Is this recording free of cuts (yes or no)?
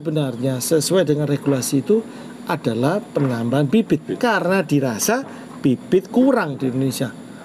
yes